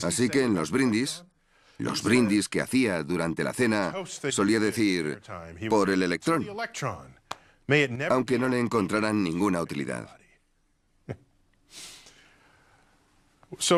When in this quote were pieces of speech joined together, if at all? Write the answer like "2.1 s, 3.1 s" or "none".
none